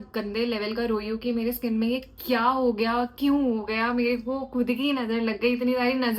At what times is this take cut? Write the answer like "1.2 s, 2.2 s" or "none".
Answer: none